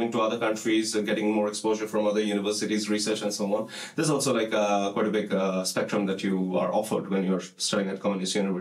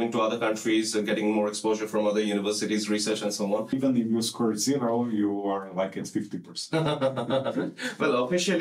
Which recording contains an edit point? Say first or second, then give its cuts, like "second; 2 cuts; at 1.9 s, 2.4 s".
second; 1 cut; at 3.8 s